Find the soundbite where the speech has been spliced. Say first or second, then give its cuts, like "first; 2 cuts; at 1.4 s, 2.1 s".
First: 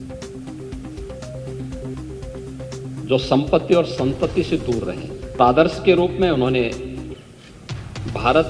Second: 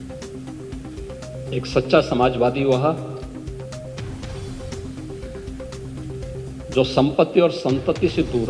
first; 3 cuts; at 1.3 s, 3.1 s, 5.4 s